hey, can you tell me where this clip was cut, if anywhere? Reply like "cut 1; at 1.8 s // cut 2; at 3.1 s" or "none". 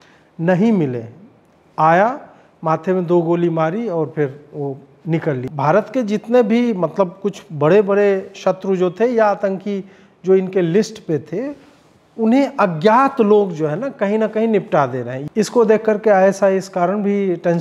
cut 1; at 5.5 s // cut 2; at 15.2 s